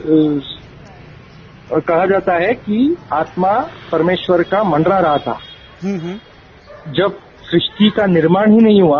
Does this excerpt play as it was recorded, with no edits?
yes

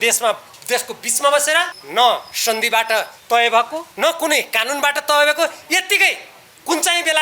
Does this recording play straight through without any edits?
no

